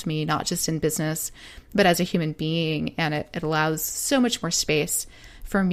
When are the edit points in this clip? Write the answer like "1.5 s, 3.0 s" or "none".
none